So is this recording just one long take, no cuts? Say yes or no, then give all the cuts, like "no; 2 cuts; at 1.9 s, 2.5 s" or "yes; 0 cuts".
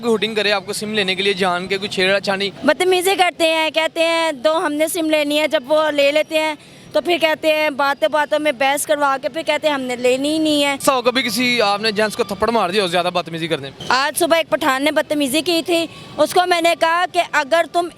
no; 3 cuts; at 2.5 s, 10.8 s, 13.7 s